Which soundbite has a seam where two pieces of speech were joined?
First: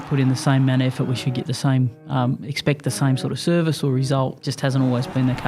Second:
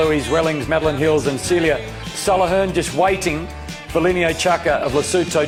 first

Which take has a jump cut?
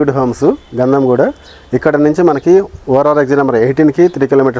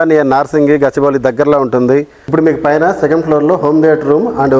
second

